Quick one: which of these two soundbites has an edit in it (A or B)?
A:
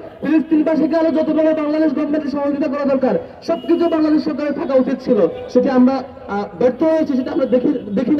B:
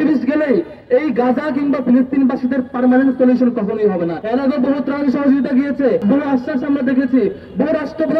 B